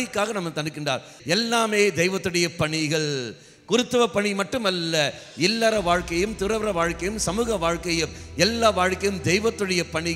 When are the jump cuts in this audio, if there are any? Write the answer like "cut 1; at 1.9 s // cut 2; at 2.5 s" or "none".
cut 1; at 1.1 s